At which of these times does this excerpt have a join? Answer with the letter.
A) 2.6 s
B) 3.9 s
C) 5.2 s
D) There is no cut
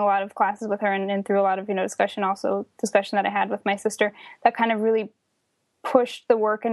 D